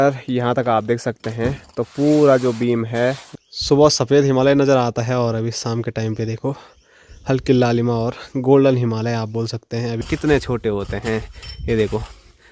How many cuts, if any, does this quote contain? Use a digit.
2